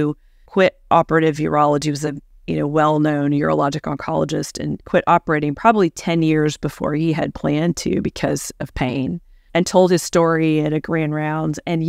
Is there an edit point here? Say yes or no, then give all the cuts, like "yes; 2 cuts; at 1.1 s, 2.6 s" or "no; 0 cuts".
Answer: yes; 2 cuts; at 4.8 s, 9.3 s